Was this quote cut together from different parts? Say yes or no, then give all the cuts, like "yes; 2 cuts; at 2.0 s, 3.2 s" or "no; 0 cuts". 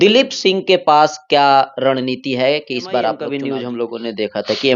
yes; 1 cut; at 3.3 s